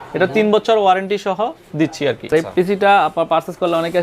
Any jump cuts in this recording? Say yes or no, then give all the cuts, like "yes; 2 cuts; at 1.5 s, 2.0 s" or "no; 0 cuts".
yes; 1 cut; at 2.3 s